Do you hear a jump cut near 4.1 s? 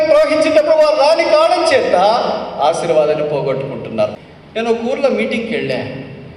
yes; 1 cut; at 4.1 s

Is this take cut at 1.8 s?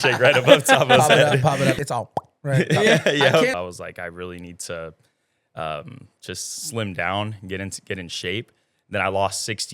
yes; 2 cuts; at 1.8 s, 3.5 s

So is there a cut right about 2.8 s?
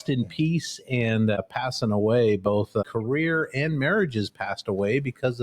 yes; 2 cuts; at 1.4 s, 2.8 s

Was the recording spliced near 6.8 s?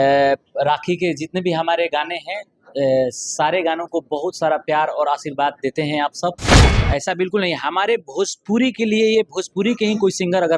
yes; 1 cut; at 6.8 s

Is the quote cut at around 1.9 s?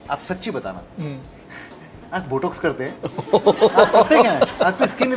no; 0 cuts

